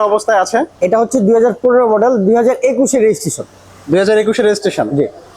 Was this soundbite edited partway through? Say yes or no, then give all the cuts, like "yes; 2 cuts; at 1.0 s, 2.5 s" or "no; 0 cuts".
no; 0 cuts